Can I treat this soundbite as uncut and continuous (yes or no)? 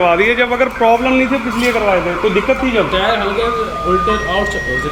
yes